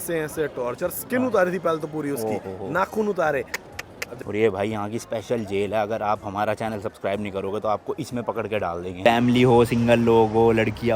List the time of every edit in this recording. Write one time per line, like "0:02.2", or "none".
0:04.2
0:09.0